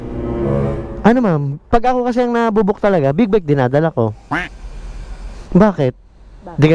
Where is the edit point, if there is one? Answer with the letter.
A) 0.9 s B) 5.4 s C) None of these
A